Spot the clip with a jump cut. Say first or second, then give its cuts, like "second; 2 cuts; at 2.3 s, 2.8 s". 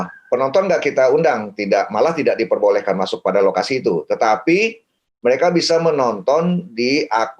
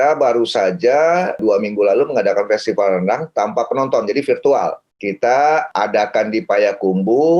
second; 3 cuts; at 1.4 s, 4.9 s, 5.7 s